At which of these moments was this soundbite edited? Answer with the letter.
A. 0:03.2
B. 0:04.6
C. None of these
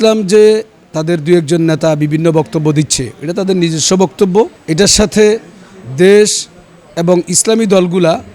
B